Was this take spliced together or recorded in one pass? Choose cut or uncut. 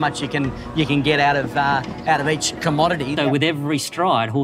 cut